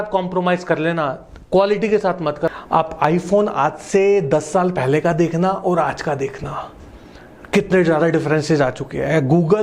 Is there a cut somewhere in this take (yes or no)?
yes